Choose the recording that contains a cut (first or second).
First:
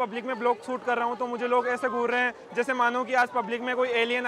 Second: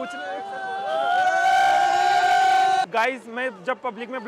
second